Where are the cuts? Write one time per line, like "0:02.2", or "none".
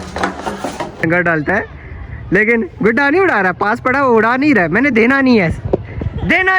0:01.0

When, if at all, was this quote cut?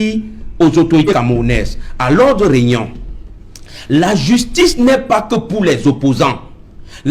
0:01.1

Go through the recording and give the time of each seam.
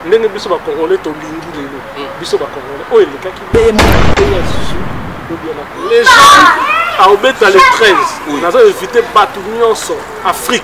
0:05.9

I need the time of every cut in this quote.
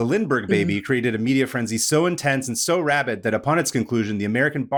none

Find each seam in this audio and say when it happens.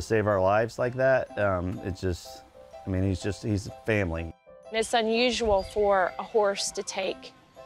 0:04.5

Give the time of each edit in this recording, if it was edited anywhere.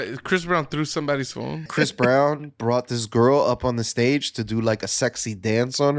0:01.7

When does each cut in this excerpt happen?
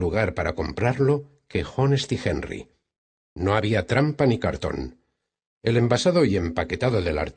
0:02.3

